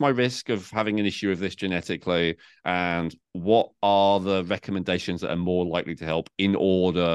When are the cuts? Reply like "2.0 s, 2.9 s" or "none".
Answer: none